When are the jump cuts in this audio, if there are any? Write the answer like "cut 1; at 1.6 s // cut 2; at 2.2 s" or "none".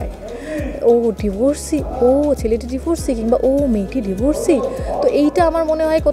none

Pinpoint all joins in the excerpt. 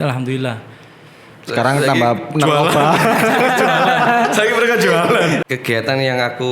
cut 1; at 5.4 s

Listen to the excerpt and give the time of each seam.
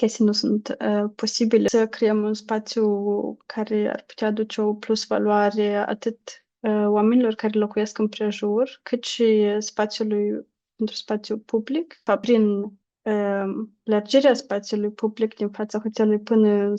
cut 1; at 1.7 s // cut 2; at 12.2 s

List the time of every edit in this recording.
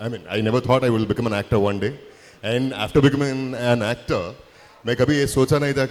none

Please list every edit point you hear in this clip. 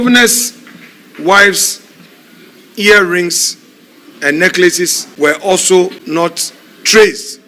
cut 1; at 5.0 s // cut 2; at 6.0 s

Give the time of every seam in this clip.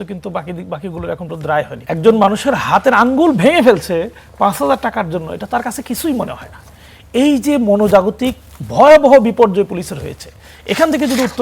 cut 1; at 1.8 s

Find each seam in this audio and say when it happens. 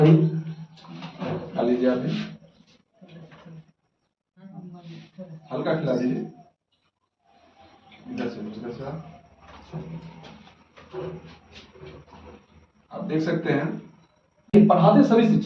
cut 1; at 14.5 s

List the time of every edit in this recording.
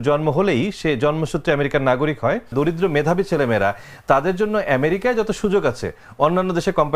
cut 1; at 2.5 s

